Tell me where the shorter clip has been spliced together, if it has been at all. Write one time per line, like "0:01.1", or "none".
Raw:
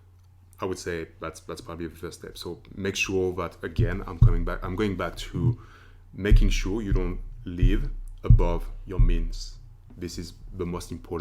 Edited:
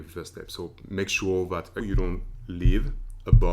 0:01.8